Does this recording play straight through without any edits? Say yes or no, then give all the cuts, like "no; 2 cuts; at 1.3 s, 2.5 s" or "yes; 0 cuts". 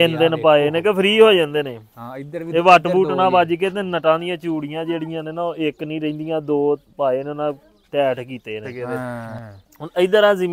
no; 1 cut; at 9.3 s